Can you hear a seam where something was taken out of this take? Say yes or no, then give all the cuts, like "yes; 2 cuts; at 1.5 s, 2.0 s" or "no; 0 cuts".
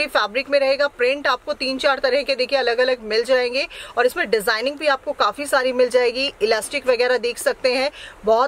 no; 0 cuts